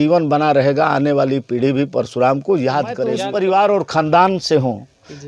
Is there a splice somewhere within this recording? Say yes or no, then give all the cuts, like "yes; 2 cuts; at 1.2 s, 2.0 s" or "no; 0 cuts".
yes; 1 cut; at 3.2 s